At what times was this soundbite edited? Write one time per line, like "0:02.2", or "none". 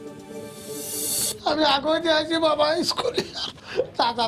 0:01.2